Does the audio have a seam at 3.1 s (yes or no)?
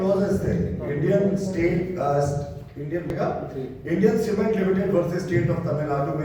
yes